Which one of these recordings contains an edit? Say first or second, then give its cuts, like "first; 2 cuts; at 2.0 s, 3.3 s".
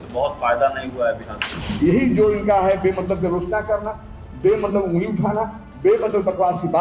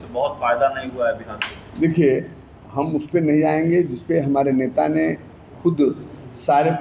first; 1 cut; at 1.7 s